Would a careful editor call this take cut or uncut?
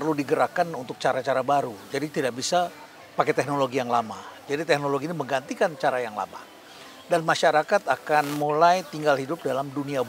uncut